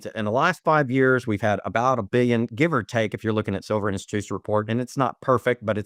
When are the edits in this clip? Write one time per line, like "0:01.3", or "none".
none